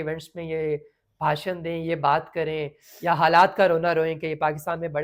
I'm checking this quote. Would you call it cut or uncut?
uncut